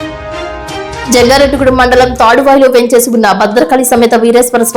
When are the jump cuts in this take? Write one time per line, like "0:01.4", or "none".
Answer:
0:01.1

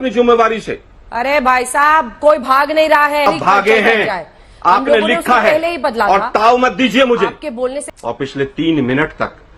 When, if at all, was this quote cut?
0:03.3
0:07.8

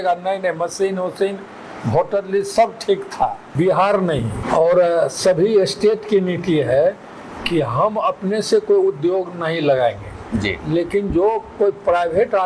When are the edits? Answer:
0:03.5
0:04.3

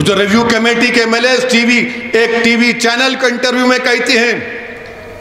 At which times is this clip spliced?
none

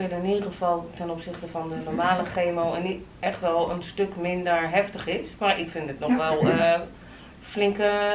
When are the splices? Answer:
none

